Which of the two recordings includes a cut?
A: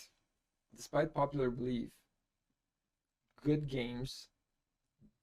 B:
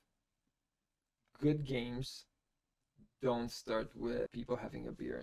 B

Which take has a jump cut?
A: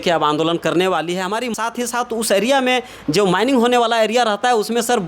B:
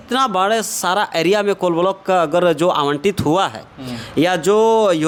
A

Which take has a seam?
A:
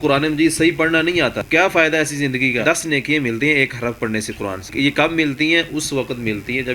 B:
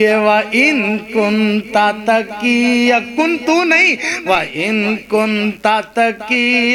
A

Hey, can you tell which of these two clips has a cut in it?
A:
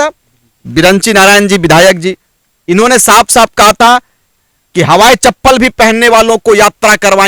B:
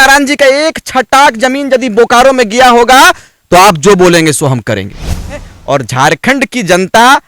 B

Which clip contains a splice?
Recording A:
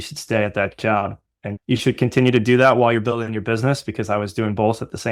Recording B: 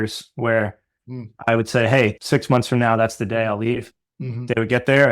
B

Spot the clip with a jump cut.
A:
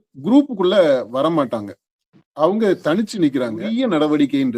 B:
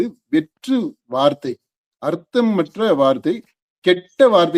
A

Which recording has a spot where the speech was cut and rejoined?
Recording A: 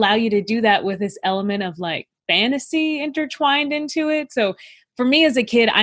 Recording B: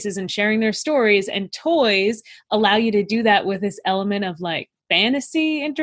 A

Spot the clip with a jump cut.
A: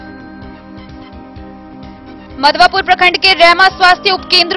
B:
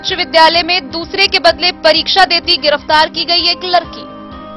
A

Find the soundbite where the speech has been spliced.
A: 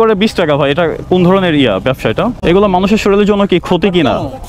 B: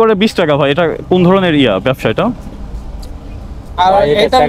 A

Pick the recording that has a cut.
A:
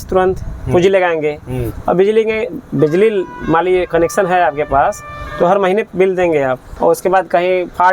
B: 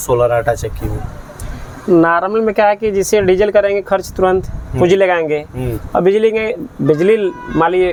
A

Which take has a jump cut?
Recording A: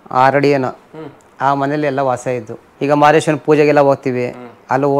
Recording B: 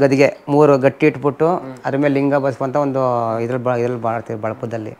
A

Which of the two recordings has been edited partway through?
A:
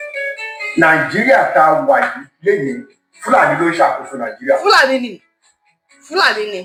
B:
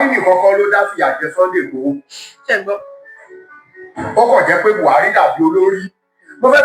B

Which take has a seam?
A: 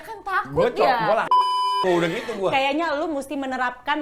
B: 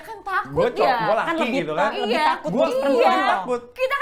A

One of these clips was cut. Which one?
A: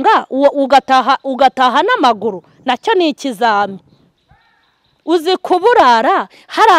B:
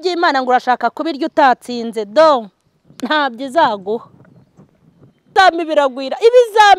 B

